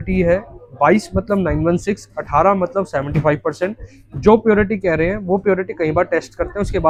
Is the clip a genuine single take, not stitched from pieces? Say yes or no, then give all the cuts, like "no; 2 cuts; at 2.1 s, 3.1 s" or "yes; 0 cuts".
yes; 0 cuts